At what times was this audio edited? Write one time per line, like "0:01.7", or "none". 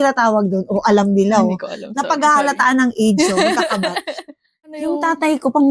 0:04.7